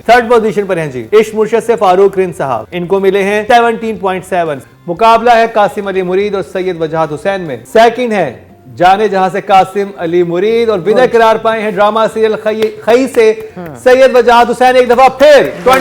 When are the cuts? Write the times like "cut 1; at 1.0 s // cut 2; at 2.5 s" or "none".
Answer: cut 1; at 1.0 s // cut 2; at 2.7 s // cut 3; at 3.4 s // cut 4; at 7.6 s